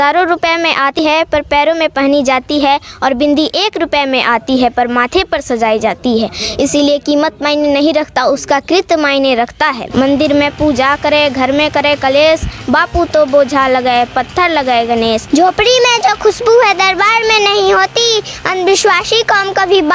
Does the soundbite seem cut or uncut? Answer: cut